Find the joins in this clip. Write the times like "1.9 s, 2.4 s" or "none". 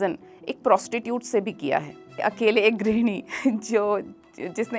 2.2 s